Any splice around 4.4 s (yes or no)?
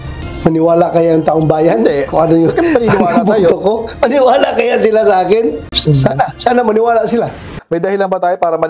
no